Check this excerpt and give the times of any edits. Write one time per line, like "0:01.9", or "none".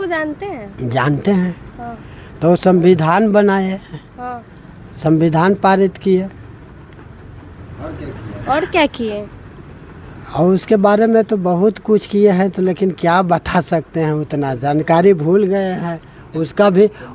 none